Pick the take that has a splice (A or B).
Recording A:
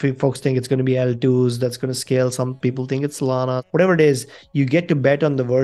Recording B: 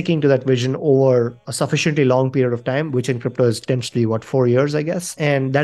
A